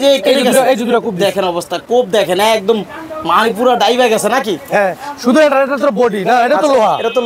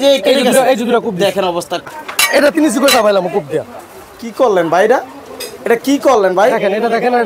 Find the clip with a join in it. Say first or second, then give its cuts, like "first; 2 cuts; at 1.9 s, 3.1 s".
second; 1 cut; at 1.9 s